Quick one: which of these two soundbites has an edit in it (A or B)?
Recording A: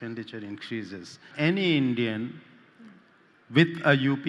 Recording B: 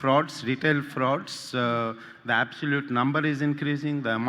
A